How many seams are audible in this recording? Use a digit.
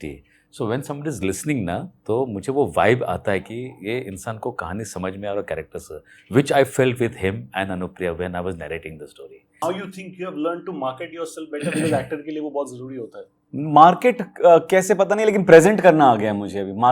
1